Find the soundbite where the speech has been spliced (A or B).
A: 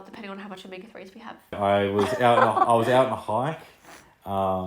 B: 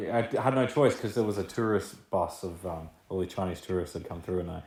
A